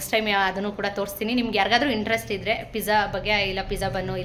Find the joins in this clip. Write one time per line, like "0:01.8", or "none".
none